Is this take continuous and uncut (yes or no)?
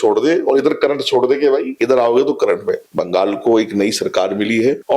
no